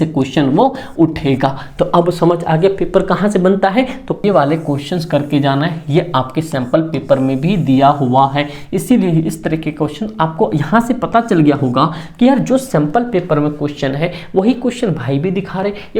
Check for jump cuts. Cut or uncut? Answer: cut